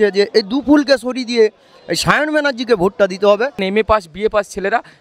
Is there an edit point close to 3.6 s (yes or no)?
yes